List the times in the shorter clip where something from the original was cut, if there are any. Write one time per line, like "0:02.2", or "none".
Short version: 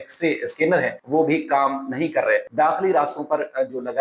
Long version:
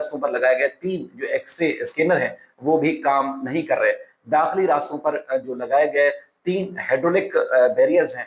0:01.0
0:02.5